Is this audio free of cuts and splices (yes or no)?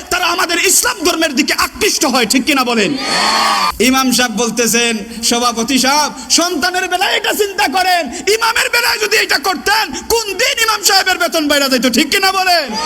no